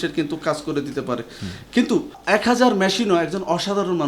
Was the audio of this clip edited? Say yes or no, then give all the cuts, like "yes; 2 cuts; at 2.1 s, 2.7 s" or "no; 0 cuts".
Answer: yes; 1 cut; at 2.2 s